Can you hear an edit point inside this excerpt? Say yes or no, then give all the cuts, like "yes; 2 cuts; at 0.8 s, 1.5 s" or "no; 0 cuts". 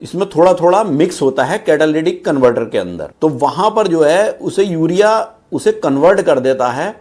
no; 0 cuts